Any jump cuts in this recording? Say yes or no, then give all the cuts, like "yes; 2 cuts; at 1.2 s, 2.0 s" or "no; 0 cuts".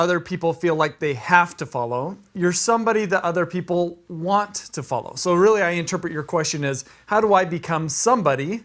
no; 0 cuts